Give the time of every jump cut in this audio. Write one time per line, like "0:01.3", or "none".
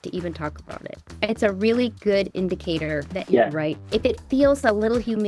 0:01.2